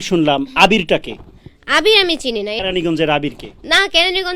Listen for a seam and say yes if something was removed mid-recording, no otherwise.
yes